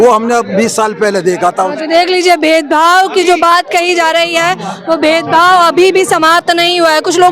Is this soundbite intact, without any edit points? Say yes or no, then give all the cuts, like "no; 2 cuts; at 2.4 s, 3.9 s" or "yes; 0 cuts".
yes; 0 cuts